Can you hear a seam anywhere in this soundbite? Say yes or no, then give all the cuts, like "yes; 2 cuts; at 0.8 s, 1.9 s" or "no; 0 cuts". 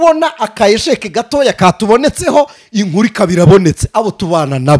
no; 0 cuts